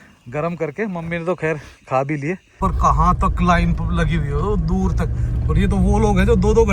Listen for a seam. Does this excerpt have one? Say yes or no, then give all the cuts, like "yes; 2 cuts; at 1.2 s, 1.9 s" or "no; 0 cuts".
yes; 1 cut; at 2.5 s